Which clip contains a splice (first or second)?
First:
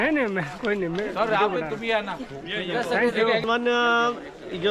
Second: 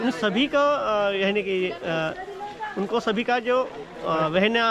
first